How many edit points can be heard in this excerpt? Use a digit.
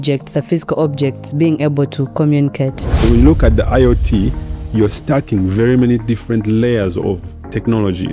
1